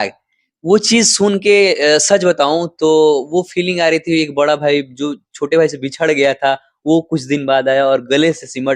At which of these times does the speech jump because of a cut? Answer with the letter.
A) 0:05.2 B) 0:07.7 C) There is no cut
C